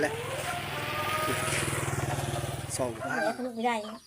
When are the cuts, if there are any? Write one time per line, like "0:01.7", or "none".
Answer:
0:03.0

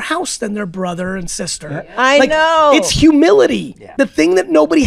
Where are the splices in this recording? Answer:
0:03.9

